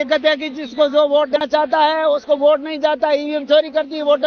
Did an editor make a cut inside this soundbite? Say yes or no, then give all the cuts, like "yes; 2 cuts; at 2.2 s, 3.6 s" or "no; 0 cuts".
yes; 1 cut; at 1.4 s